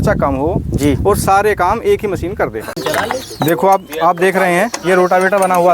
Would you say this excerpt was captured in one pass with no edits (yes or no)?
no